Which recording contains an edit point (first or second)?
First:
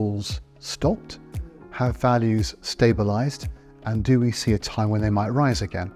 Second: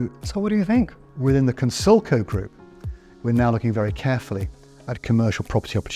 second